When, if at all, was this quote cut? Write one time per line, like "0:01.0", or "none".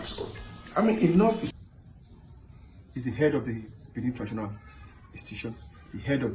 0:01.5